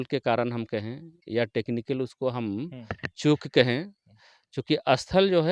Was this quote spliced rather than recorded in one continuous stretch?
no; 0 cuts

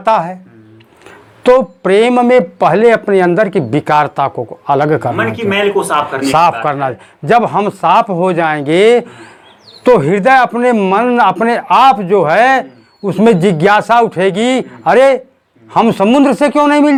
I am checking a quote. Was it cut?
no; 0 cuts

